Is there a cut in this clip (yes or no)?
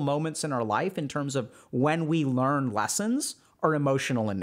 no